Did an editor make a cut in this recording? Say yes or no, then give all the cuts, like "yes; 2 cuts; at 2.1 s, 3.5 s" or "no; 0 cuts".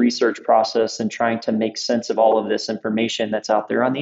no; 0 cuts